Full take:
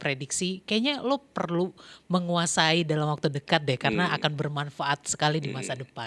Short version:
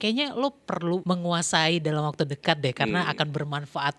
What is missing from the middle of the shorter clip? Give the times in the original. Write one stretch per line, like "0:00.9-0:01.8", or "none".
0:01.7-0:02.1